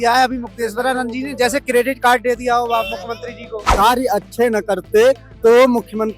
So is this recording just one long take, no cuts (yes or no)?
no